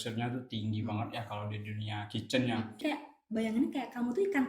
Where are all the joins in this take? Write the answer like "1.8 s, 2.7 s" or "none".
2.8 s